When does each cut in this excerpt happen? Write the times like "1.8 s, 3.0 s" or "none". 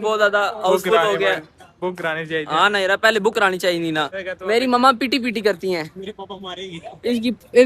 1.6 s, 4.2 s